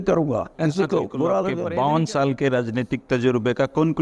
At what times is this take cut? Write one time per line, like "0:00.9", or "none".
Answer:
0:01.6